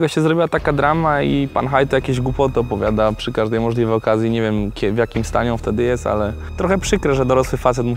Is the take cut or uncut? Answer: cut